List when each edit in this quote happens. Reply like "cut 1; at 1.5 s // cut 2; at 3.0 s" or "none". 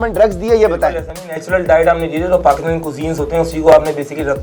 none